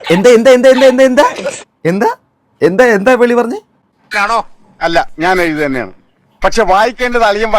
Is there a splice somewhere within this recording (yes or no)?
yes